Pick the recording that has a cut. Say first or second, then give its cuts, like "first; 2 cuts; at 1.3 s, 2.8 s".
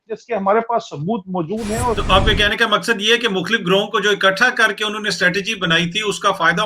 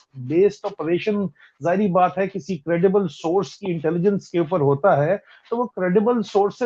first; 1 cut; at 2.0 s